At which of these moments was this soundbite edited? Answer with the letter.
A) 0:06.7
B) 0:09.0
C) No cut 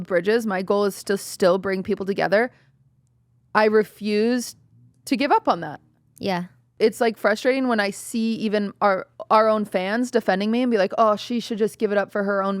A